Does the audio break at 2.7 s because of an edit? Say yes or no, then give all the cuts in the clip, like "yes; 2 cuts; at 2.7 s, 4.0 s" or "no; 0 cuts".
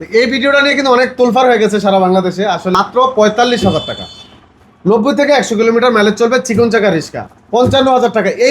yes; 1 cut; at 2.7 s